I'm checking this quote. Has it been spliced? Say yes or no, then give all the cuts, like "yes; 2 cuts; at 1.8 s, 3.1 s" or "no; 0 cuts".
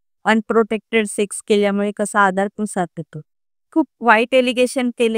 yes; 1 cut; at 3.6 s